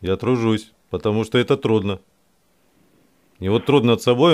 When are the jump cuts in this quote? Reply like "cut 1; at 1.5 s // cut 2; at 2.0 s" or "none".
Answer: none